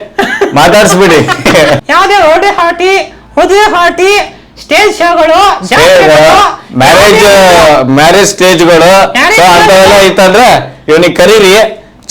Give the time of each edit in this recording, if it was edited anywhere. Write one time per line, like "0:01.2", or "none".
0:01.8